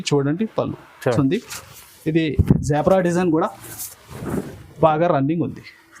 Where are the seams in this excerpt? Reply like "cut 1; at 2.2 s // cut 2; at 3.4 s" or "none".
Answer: cut 1; at 1.2 s